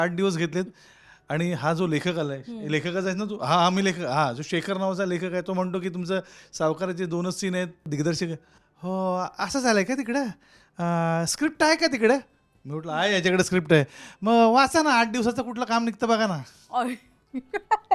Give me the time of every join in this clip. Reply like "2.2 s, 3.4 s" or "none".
7.9 s